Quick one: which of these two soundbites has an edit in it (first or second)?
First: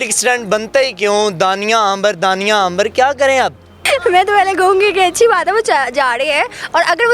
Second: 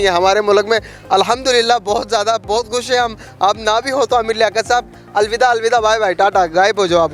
first